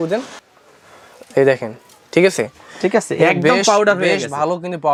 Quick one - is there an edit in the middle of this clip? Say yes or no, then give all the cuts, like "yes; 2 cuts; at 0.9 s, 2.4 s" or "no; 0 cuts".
no; 0 cuts